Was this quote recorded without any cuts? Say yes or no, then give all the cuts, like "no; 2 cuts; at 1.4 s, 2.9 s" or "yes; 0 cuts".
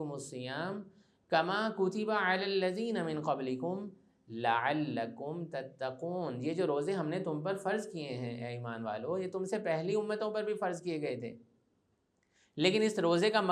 yes; 0 cuts